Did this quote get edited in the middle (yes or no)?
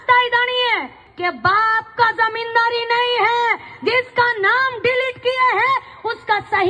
yes